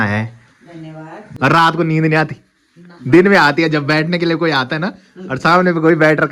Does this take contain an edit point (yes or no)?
yes